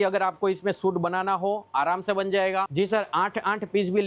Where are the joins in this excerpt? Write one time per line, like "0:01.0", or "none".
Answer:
0:02.7